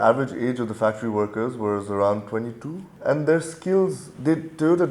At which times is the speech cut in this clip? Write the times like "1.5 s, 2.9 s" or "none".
none